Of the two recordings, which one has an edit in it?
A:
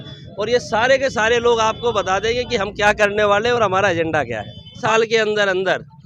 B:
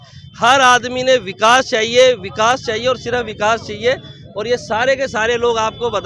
A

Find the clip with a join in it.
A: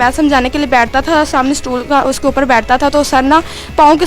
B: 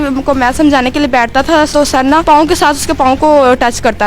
B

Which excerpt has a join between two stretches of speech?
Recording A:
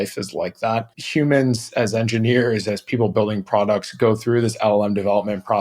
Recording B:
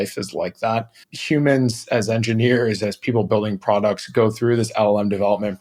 A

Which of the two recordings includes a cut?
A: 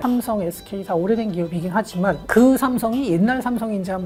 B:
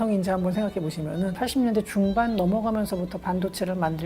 B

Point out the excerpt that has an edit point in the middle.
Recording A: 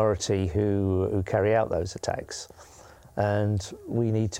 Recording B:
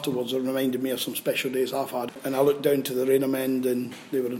B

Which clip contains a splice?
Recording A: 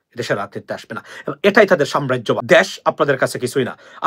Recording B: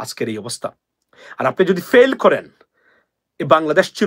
A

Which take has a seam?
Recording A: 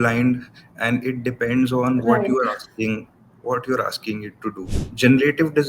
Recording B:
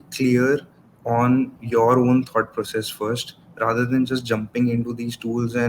A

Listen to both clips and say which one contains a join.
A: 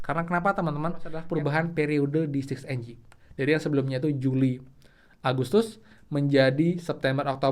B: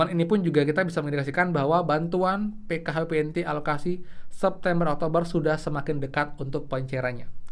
A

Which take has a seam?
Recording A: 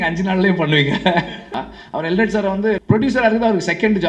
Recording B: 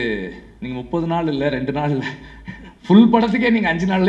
A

